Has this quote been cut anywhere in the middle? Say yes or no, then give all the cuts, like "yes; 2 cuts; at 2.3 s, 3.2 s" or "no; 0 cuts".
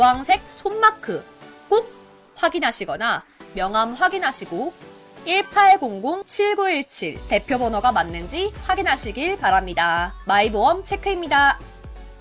no; 0 cuts